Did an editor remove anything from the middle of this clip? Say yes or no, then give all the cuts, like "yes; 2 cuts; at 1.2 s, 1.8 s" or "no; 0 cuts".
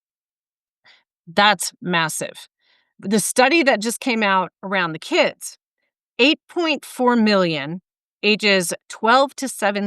yes; 1 cut; at 3.0 s